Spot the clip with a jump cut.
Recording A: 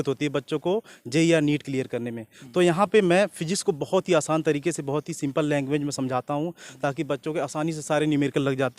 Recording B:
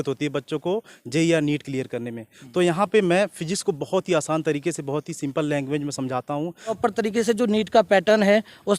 B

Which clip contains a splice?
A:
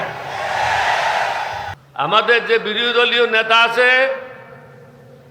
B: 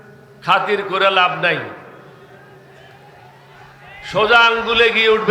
A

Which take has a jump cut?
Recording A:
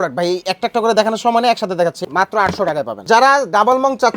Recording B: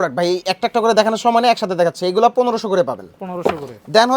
A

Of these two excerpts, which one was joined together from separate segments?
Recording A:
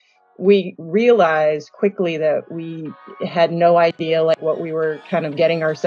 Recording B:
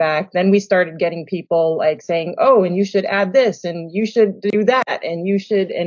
A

